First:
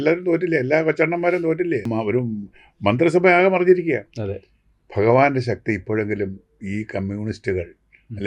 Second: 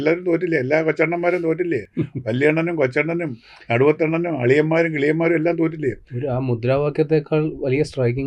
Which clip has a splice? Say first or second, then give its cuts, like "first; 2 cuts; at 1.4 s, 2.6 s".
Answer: first; 1 cut; at 1.9 s